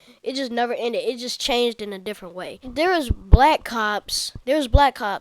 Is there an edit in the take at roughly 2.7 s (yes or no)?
yes